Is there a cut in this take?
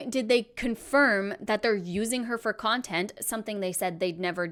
no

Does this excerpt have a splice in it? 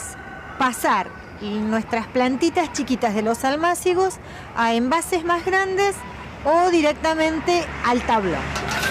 yes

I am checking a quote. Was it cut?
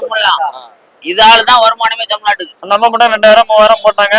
yes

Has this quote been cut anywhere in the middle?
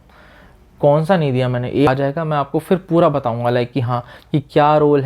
yes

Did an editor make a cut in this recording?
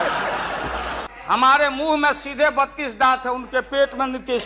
yes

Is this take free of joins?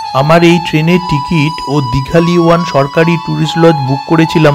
yes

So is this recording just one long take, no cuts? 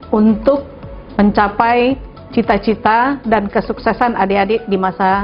yes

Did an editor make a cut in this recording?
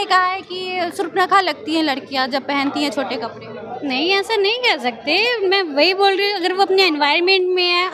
no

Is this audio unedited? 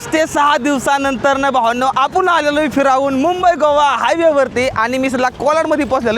yes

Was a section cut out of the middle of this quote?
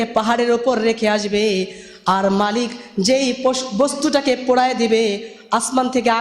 no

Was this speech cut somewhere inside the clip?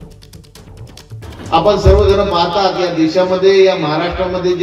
yes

